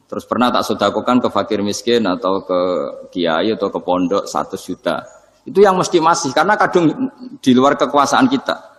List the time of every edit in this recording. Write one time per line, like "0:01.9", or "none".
none